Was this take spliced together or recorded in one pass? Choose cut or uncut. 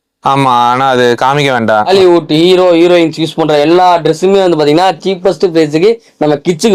cut